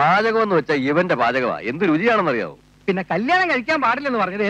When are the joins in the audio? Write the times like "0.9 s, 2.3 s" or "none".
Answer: 2.6 s